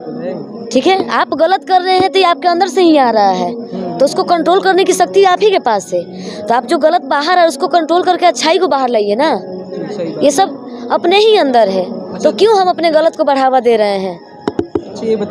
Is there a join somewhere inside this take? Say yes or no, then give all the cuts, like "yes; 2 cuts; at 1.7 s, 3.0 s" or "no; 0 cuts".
no; 0 cuts